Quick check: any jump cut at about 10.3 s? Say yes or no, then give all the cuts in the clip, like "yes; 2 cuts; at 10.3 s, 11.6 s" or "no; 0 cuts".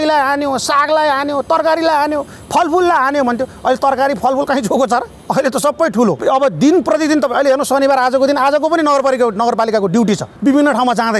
yes; 3 cuts; at 5.2 s, 6.2 s, 10.3 s